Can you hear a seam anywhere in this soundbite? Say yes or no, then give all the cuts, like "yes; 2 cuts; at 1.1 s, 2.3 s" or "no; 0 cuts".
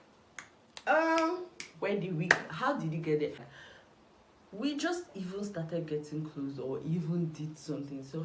yes; 1 cut; at 3.5 s